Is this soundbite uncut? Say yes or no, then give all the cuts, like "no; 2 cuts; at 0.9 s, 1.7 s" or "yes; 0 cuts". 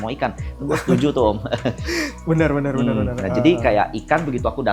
yes; 0 cuts